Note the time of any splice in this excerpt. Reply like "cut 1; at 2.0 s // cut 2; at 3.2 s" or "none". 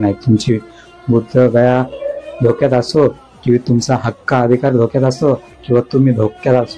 none